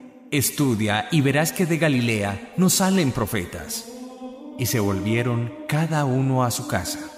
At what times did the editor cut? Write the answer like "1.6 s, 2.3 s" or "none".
6.1 s